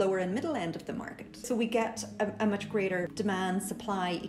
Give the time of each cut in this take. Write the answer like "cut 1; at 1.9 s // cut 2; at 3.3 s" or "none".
cut 1; at 1.4 s // cut 2; at 3.1 s